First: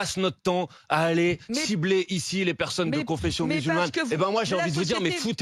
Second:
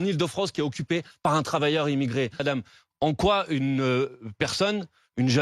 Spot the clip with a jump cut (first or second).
second